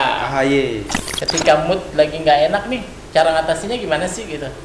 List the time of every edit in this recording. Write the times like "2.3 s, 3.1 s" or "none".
0.9 s